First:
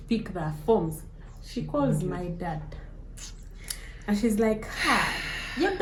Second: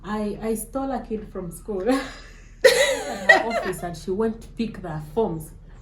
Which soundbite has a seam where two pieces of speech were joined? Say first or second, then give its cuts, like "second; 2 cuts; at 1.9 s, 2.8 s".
second; 1 cut; at 3.5 s